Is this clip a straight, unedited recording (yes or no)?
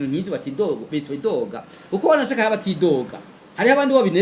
yes